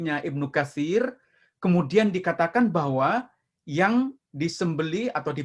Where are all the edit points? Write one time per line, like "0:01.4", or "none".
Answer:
none